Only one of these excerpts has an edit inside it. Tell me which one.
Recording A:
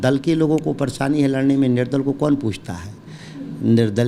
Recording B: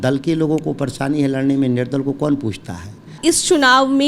B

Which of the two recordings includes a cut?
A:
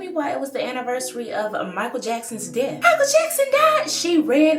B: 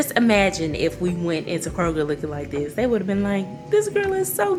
A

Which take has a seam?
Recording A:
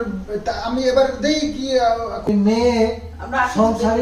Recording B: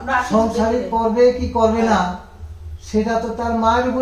A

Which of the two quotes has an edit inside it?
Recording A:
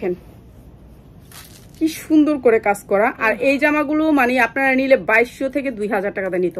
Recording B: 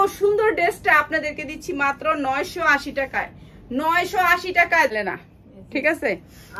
B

